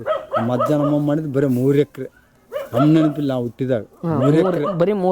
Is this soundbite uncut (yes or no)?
yes